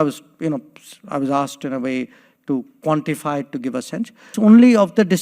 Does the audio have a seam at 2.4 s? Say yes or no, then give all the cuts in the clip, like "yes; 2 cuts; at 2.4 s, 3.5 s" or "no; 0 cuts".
no; 1 cut; at 4.3 s